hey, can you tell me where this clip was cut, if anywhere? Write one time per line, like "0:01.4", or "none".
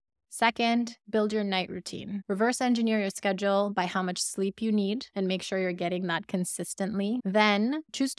0:07.2